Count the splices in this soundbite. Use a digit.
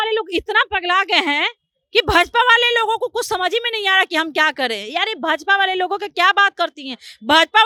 0